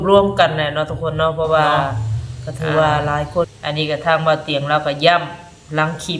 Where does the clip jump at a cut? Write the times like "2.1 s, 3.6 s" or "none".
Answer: 3.5 s

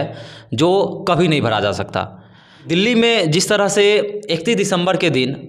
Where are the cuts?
none

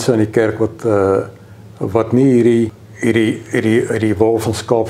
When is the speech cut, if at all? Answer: 2.8 s

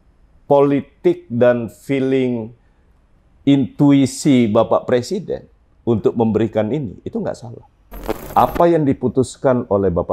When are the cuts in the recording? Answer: 8.3 s

